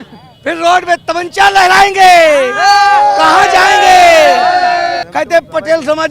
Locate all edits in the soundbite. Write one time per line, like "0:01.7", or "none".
0:05.0